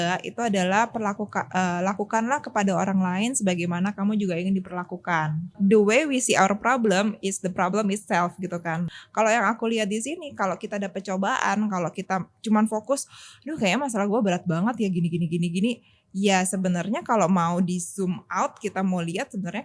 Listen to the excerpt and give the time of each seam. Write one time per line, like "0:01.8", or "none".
0:05.5
0:08.9